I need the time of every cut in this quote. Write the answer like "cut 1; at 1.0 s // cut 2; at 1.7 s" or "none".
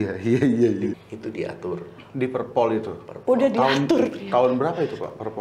cut 1; at 0.9 s